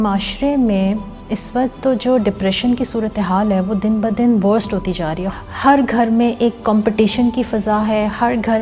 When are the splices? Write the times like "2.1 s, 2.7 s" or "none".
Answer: 5.2 s